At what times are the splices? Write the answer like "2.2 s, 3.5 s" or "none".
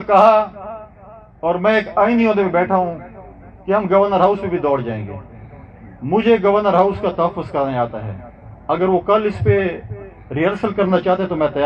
none